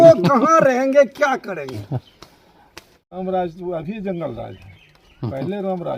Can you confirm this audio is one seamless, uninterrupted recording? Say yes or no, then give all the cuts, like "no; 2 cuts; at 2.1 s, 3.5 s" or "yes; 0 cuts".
no; 1 cut; at 3.1 s